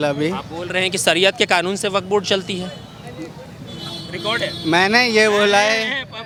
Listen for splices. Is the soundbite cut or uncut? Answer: uncut